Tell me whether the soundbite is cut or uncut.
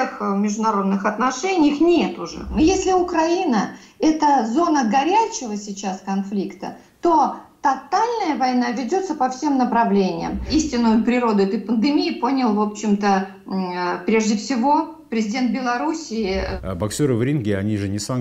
cut